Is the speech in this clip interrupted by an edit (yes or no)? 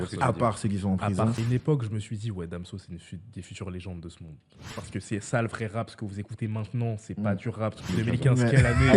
yes